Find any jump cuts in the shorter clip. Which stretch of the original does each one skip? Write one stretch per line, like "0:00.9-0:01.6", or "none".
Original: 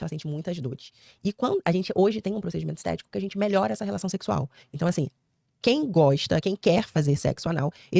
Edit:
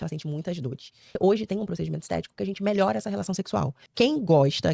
0:01.1-0:01.9
0:04.5-0:05.5